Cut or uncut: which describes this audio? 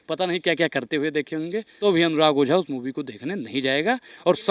cut